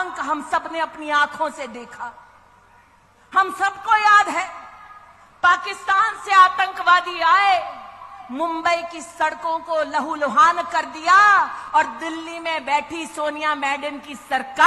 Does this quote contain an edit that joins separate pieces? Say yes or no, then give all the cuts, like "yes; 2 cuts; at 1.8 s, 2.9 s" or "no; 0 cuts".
no; 0 cuts